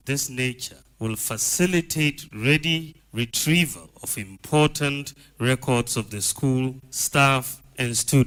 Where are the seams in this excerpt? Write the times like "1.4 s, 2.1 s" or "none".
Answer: none